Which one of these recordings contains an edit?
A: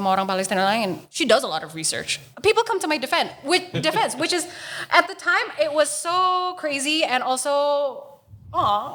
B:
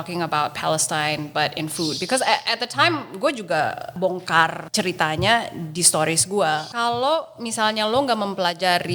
B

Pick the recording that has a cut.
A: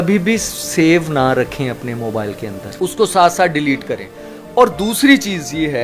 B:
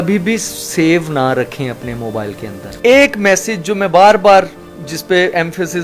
B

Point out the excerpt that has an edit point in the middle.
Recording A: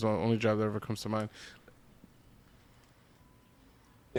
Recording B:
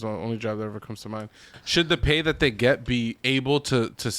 B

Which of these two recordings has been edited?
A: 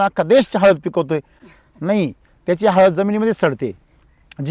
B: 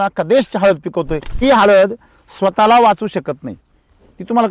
B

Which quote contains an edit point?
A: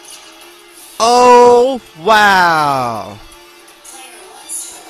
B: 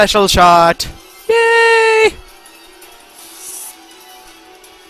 A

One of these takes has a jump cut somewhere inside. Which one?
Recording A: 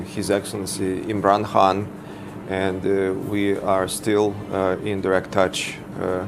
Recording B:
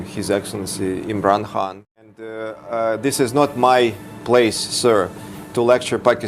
B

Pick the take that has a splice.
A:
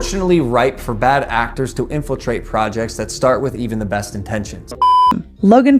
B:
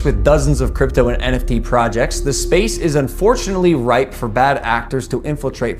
A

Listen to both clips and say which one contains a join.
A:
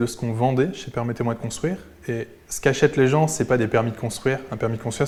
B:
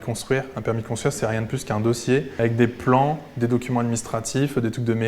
B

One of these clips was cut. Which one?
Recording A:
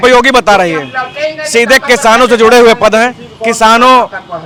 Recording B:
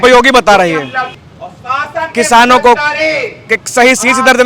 B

